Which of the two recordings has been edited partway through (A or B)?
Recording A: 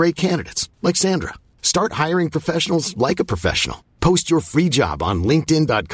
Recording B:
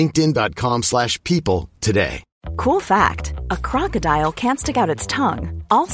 B